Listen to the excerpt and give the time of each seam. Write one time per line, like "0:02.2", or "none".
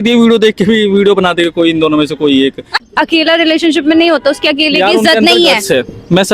0:02.7